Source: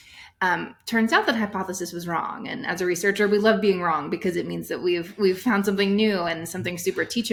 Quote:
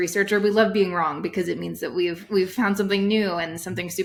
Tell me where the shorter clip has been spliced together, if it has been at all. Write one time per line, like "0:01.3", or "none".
none